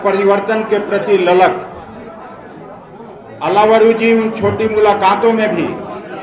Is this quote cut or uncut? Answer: uncut